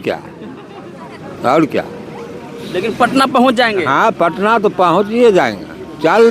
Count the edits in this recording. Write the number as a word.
zero